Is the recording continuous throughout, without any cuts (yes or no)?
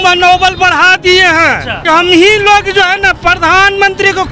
no